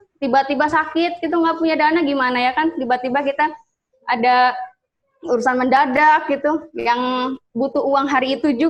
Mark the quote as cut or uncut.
uncut